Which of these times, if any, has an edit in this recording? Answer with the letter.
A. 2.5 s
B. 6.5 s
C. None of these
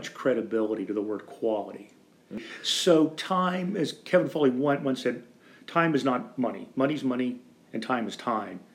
A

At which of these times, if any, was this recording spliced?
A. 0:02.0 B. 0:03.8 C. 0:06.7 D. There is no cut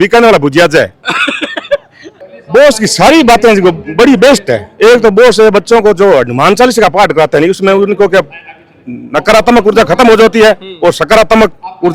A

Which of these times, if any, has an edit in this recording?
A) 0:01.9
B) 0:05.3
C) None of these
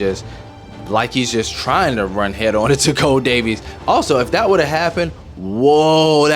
B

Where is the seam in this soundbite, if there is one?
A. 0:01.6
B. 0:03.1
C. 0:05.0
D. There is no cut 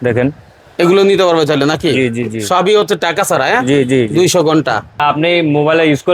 C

